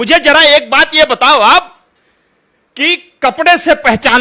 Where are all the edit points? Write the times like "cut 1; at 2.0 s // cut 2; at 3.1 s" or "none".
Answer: none